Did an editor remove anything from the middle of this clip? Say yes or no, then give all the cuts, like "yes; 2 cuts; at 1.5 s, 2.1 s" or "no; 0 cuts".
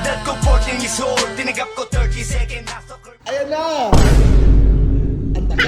no; 0 cuts